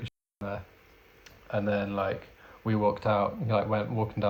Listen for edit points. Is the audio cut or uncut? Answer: uncut